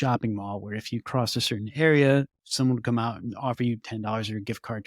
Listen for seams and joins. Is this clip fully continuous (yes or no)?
no